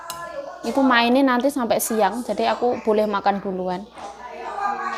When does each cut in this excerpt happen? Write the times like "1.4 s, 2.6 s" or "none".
none